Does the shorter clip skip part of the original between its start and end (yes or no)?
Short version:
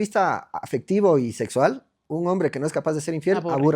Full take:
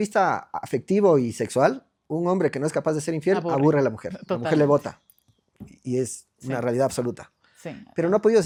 no